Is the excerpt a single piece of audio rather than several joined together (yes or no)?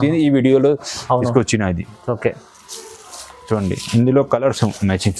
yes